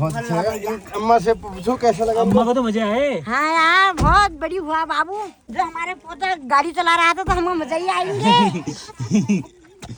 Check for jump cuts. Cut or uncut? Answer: uncut